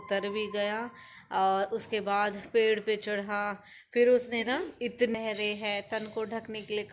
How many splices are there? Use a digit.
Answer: 1